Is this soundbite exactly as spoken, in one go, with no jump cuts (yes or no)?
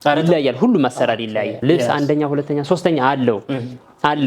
no